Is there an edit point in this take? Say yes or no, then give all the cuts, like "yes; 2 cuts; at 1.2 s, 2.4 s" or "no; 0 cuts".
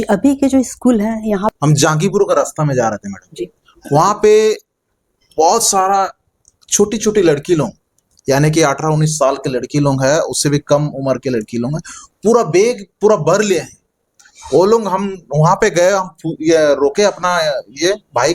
yes; 1 cut; at 1.5 s